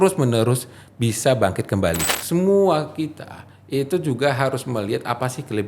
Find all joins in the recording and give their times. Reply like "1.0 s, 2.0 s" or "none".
2.1 s